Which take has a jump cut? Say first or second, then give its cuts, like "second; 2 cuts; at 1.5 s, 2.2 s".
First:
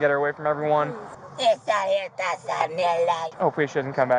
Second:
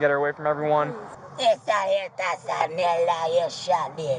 first; 1 cut; at 3.3 s